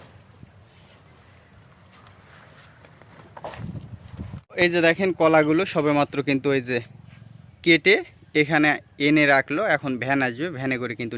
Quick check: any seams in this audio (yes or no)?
yes